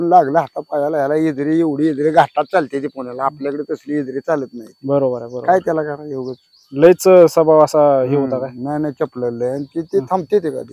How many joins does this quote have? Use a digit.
0